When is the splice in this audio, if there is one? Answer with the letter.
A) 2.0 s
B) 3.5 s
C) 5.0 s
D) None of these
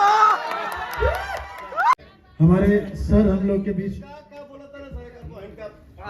A